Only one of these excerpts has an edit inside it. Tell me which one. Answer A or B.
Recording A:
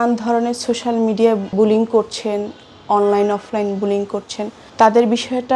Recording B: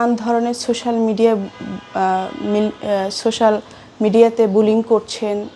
A